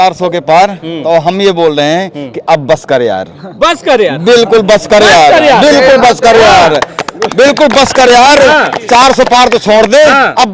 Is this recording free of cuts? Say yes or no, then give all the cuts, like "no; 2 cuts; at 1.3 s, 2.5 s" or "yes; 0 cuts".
yes; 0 cuts